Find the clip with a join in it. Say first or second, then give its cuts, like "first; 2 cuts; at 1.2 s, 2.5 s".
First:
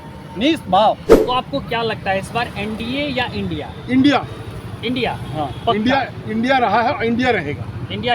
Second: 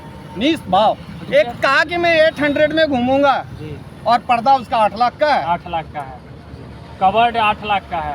first; 1 cut; at 1.1 s